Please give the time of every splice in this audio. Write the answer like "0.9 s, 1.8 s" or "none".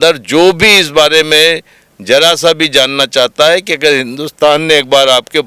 none